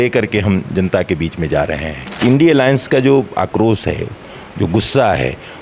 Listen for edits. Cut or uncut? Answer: cut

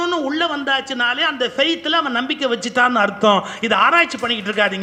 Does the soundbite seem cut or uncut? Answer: uncut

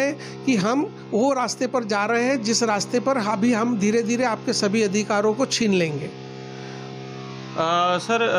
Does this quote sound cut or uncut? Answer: uncut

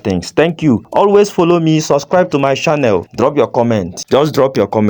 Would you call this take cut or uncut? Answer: cut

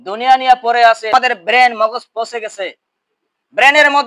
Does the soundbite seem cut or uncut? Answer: cut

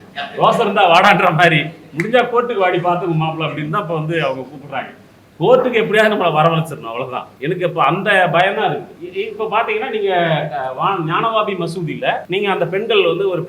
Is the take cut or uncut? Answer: cut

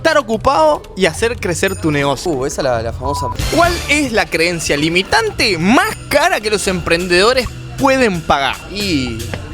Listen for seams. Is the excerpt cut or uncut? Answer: cut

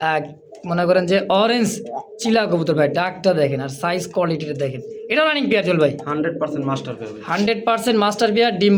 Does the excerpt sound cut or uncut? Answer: uncut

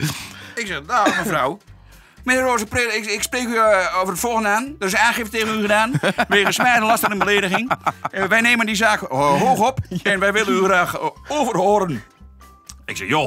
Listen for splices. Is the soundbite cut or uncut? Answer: uncut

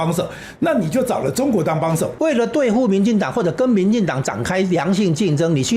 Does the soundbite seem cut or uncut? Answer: cut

